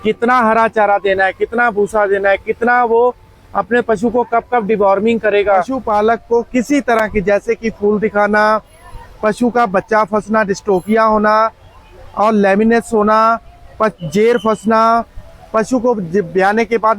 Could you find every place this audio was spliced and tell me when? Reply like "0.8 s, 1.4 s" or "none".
5.8 s